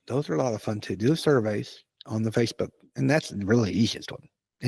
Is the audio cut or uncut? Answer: uncut